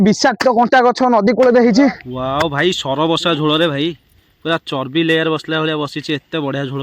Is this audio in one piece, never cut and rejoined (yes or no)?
no